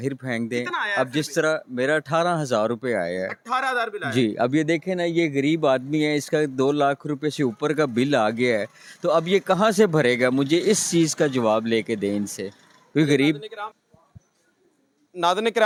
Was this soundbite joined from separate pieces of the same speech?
no; 0 cuts

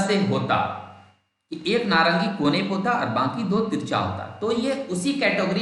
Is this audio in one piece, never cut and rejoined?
yes; 0 cuts

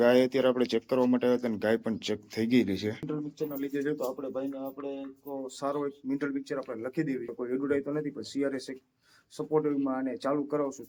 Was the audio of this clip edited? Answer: no; 0 cuts

